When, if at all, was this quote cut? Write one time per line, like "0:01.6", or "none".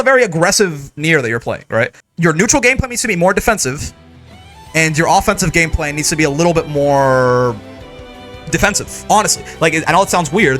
0:02.0